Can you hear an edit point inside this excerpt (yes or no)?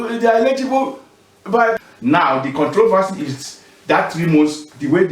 yes